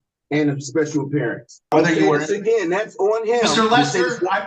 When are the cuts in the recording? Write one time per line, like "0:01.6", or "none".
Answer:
0:01.7